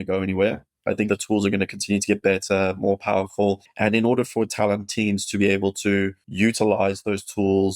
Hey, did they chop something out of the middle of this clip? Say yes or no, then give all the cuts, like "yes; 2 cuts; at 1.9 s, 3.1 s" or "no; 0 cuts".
yes; 3 cuts; at 1.1 s, 3.7 s, 6.2 s